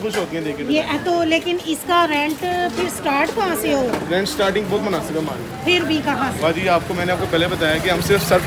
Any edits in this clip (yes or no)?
no